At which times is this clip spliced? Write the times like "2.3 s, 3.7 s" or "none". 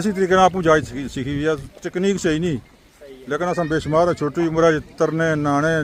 none

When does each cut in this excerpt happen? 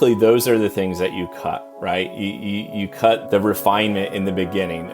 3.2 s

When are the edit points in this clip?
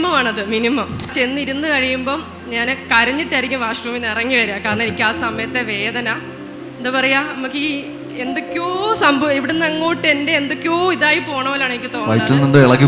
1.1 s

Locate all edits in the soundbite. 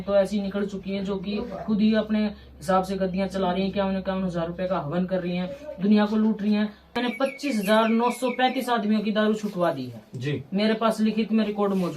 7.0 s

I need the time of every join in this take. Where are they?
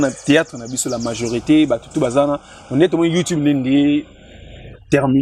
none

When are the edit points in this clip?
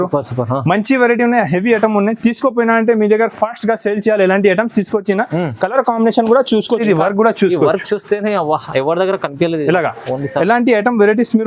6.8 s

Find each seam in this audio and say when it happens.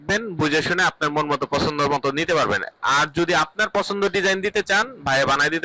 none

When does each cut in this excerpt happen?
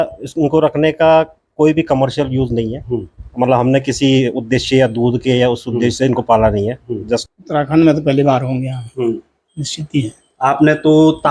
7.3 s

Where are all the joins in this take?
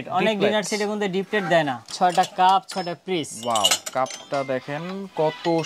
1.9 s

